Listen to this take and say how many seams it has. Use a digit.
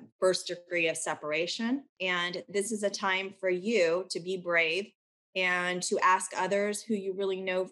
0